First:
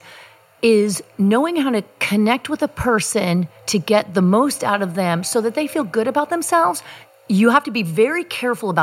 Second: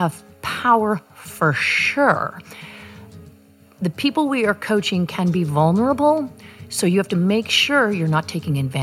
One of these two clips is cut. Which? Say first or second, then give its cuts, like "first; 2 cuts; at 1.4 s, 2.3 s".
first; 1 cut; at 7.0 s